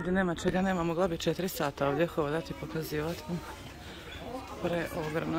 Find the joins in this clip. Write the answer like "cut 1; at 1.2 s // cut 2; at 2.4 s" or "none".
none